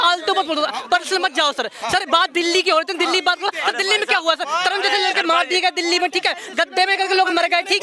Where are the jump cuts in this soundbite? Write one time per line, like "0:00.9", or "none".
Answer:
none